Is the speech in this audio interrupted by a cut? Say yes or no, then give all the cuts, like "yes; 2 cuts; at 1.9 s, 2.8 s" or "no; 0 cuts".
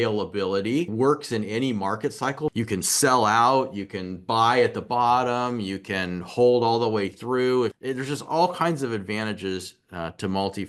yes; 3 cuts; at 0.9 s, 2.5 s, 7.8 s